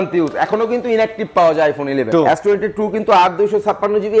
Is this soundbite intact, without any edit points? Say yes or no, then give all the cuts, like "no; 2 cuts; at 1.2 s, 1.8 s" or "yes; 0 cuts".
no; 1 cut; at 2.1 s